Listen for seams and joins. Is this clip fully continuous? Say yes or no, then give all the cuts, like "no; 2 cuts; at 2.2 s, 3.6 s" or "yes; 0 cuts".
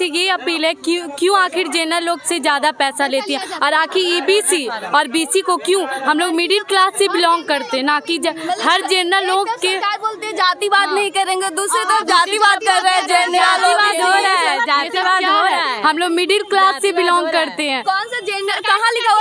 yes; 0 cuts